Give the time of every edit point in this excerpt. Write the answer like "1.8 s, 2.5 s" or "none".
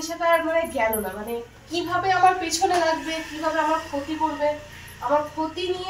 none